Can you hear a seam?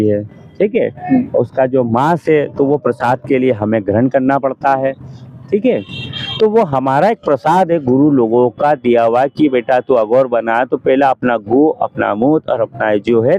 no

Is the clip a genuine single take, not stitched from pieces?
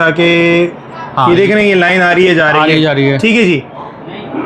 yes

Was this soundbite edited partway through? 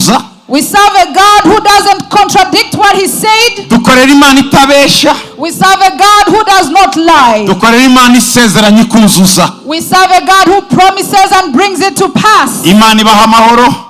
no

